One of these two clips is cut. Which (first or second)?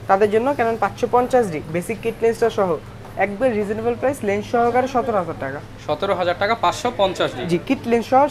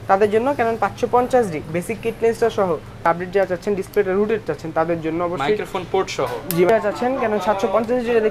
second